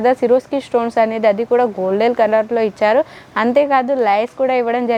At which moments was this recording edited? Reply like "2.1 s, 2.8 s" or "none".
none

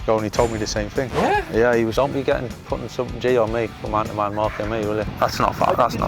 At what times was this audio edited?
1.9 s, 5.1 s

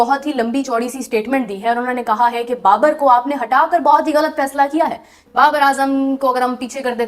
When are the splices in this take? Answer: 5.3 s

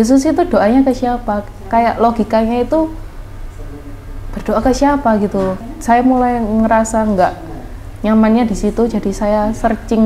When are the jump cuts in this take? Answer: 5.6 s

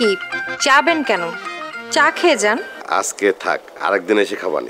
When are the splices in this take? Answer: 2.8 s

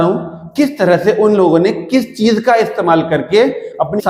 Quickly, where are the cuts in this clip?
none

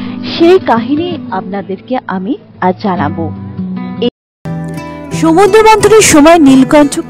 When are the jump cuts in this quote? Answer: 4.1 s

